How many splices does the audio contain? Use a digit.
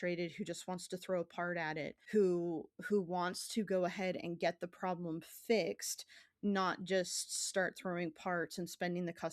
1